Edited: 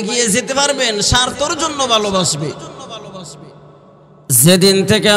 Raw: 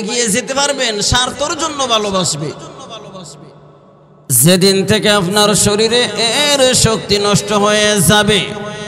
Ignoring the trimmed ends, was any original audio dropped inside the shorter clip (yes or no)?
no